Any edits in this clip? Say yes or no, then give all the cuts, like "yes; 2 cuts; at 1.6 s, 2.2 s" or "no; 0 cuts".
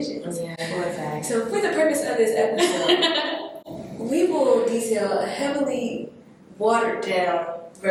no; 0 cuts